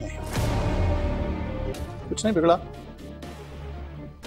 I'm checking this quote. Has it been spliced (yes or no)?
yes